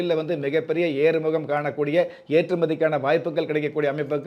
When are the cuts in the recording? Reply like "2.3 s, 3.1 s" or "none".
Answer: none